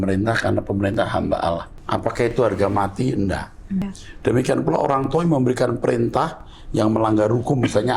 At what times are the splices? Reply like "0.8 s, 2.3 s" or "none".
1.7 s, 4.0 s